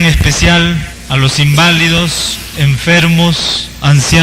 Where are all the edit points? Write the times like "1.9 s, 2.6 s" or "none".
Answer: 1.0 s